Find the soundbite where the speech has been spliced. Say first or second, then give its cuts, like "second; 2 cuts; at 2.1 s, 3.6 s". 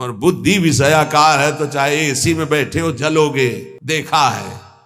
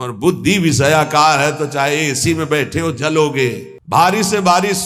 second; 1 cut; at 3.7 s